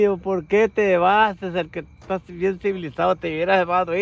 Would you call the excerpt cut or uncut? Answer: uncut